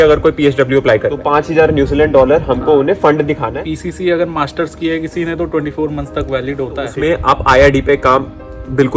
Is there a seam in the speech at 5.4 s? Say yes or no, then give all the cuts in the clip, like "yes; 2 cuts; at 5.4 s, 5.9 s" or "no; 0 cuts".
no; 3 cuts; at 1.2 s, 3.5 s, 6.9 s